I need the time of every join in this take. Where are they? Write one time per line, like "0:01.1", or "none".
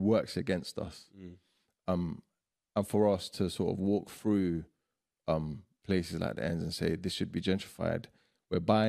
none